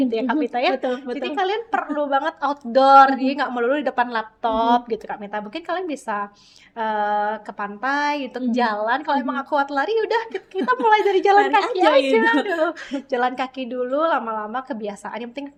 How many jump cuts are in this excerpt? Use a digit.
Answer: 0